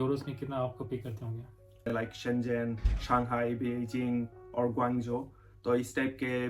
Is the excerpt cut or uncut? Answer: cut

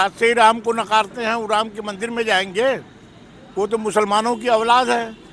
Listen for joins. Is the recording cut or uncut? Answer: uncut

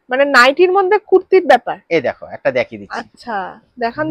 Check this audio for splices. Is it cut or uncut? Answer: uncut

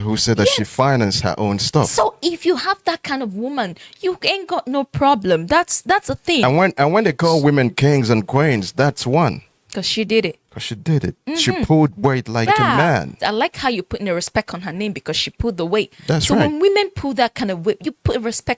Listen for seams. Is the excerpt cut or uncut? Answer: uncut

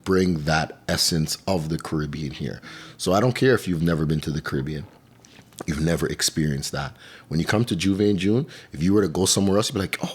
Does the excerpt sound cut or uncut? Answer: uncut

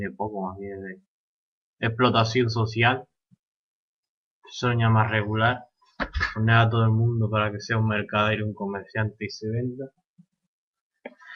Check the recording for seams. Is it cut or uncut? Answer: uncut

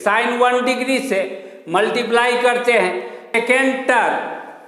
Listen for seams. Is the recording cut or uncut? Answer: cut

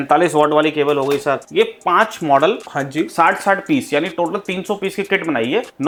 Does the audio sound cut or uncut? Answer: uncut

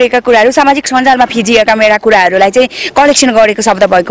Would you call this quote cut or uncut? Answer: uncut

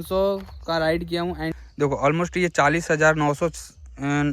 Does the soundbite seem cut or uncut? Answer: cut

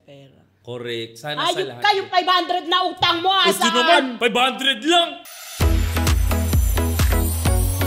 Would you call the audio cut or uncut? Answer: uncut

